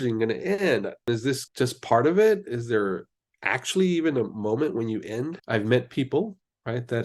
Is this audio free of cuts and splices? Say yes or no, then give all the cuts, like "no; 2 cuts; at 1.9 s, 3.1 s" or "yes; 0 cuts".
no; 2 cuts; at 1.0 s, 5.4 s